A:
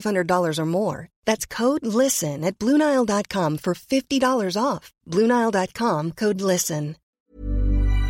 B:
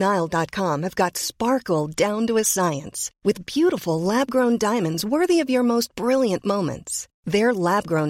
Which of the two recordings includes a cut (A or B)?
A